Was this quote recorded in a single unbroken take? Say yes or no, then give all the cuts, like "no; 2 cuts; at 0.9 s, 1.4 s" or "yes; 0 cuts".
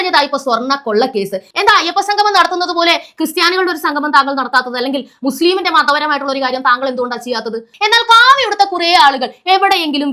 no; 2 cuts; at 1.4 s, 7.7 s